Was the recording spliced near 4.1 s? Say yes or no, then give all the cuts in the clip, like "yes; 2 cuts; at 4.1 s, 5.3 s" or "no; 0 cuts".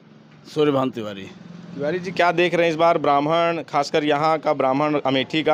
no; 0 cuts